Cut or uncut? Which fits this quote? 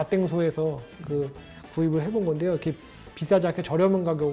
uncut